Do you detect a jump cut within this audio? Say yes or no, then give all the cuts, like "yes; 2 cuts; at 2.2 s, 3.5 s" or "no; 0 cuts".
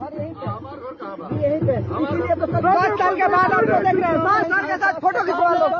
yes; 1 cut; at 4.4 s